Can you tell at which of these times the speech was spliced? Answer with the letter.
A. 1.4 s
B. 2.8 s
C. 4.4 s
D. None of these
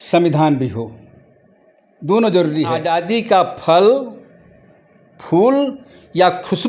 B